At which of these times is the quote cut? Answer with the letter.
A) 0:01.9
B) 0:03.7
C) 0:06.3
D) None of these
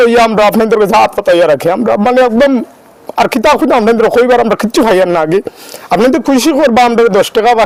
D